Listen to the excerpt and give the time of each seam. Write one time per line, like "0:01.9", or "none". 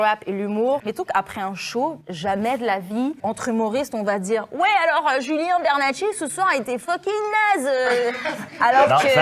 0:00.8
0:03.2

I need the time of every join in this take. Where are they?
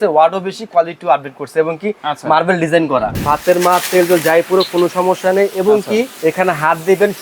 0:03.1
0:06.1

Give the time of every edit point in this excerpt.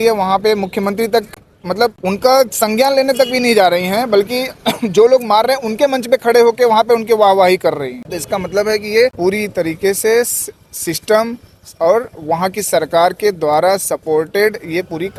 none

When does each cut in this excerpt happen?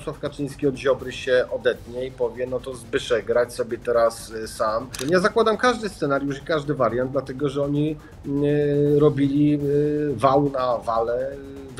0:05.0

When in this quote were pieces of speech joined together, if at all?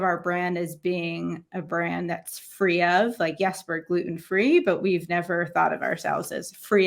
none

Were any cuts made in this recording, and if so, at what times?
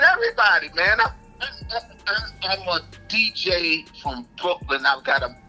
none

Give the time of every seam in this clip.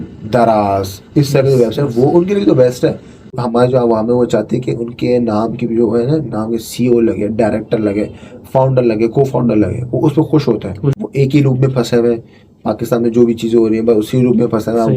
0:03.3
0:11.0

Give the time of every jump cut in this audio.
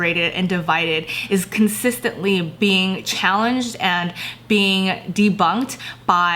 none

